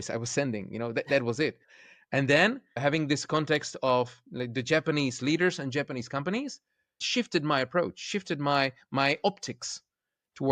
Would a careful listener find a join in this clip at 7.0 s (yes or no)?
yes